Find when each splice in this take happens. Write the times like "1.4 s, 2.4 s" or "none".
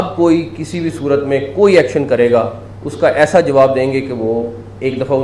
none